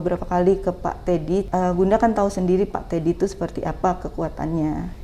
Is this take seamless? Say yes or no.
no